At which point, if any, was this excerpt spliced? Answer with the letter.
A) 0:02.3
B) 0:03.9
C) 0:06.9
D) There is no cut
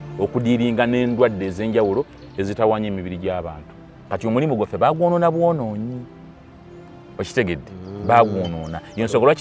B